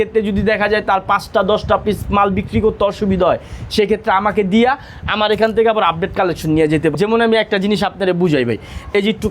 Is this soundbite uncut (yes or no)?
no